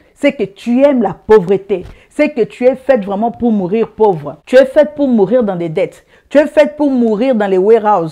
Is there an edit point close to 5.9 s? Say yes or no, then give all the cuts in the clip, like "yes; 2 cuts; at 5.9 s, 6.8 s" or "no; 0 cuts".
no; 1 cut; at 4.3 s